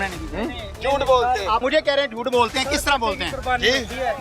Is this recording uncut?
no; 1 cut; at 1.6 s

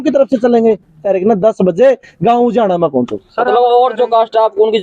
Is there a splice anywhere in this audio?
yes; 1 cut; at 1.0 s

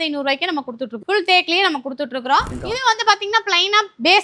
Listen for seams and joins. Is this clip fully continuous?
no; 2 cuts; at 0.9 s, 2.5 s

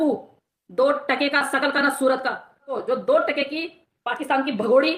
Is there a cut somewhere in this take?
yes; 1 cut; at 2.7 s

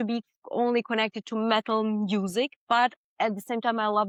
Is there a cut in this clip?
no; 0 cuts

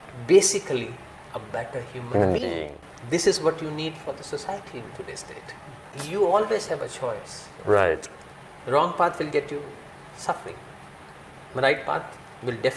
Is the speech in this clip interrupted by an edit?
yes; 1 cut; at 6.0 s

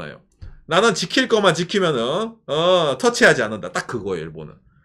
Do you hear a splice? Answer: no; 0 cuts

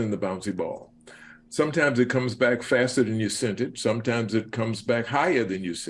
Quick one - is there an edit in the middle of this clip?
no; 0 cuts

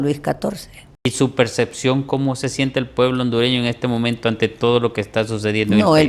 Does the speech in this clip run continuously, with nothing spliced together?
no; 1 cut; at 1.1 s

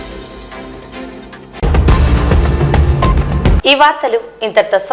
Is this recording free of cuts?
yes; 0 cuts

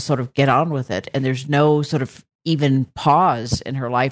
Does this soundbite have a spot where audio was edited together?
no; 0 cuts

